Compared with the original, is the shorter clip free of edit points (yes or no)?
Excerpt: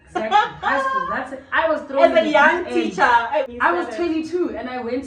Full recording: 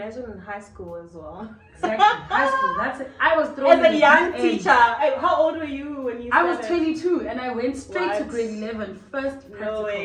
no